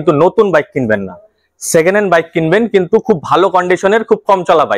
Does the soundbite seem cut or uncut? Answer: uncut